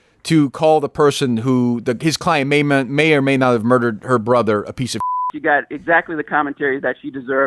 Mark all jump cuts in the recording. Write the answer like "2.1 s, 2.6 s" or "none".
5.2 s